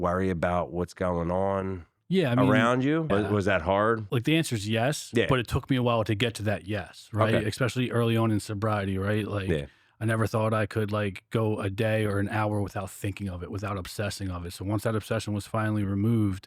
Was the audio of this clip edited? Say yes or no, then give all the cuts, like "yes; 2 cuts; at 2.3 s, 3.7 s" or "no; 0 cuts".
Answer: yes; 2 cuts; at 3.1 s, 4.0 s